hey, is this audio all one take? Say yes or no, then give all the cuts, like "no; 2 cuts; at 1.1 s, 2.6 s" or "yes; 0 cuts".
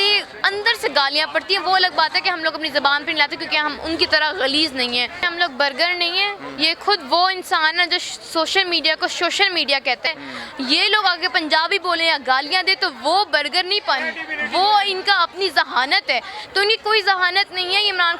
no; 2 cuts; at 5.3 s, 10.1 s